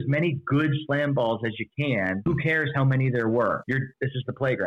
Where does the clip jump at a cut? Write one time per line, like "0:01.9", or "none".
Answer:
0:02.2
0:03.6